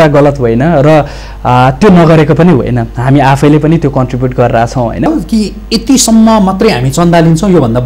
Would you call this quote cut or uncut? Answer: cut